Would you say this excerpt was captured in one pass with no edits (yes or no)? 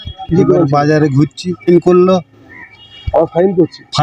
no